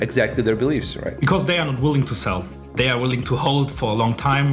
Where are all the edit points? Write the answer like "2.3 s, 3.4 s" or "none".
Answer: none